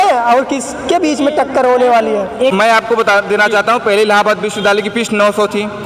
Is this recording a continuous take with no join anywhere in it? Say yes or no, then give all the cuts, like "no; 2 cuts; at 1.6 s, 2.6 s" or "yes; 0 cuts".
no; 1 cut; at 2.5 s